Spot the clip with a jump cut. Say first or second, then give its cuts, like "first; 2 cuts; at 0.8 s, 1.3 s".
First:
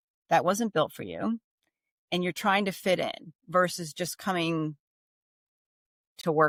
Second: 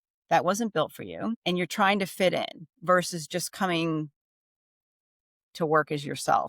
second; 1 cut; at 1.4 s